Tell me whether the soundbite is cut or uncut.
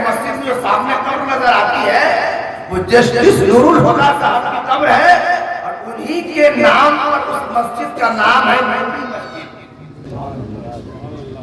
cut